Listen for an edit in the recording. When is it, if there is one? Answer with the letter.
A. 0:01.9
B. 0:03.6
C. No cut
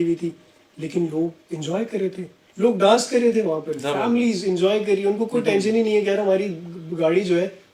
C